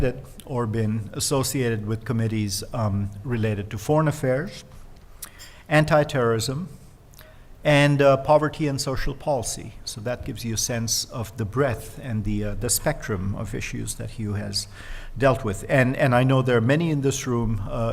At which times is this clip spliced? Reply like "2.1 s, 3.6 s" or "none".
none